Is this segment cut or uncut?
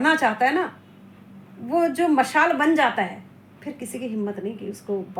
uncut